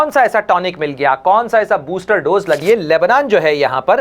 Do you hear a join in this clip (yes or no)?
yes